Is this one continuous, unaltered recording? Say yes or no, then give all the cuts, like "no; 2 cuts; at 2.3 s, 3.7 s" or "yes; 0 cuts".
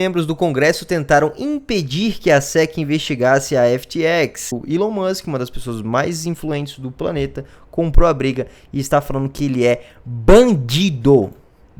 no; 1 cut; at 4.5 s